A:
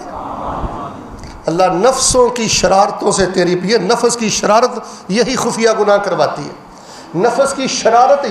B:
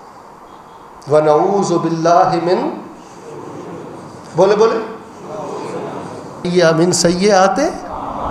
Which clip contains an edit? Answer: B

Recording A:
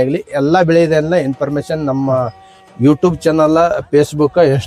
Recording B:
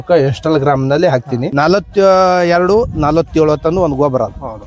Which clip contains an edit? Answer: B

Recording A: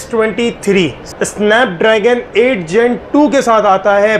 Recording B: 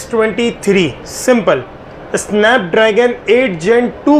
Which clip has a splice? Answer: A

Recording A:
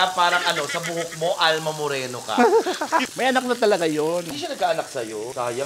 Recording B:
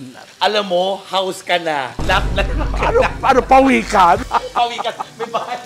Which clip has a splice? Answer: A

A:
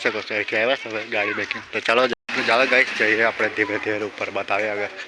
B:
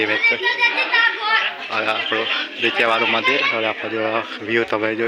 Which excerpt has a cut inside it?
A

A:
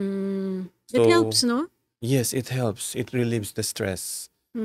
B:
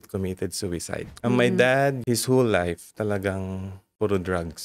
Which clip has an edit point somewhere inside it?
B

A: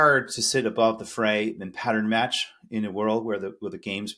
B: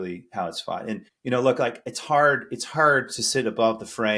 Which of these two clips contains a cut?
B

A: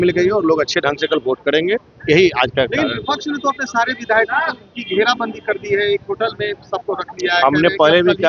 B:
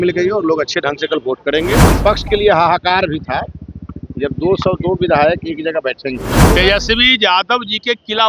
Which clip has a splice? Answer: B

